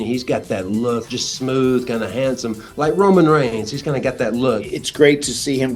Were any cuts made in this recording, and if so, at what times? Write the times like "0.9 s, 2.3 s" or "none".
1.0 s, 4.7 s